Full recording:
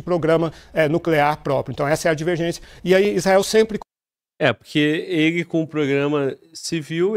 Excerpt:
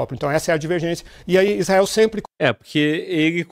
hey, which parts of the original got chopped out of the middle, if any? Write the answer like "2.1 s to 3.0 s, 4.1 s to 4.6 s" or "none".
3.8 s to 4.3 s